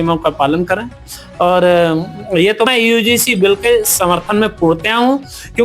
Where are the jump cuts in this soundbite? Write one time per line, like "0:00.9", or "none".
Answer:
0:02.7